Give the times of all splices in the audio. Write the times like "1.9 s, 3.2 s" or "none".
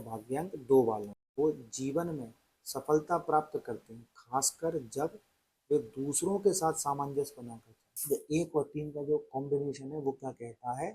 1.2 s, 7.9 s